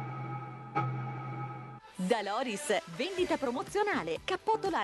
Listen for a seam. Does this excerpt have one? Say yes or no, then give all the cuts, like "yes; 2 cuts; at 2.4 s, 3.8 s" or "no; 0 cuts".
yes; 1 cut; at 1.6 s